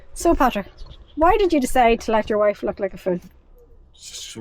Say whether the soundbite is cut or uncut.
uncut